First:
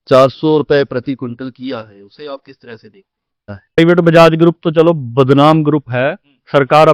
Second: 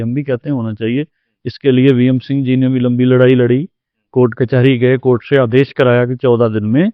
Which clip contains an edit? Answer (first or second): first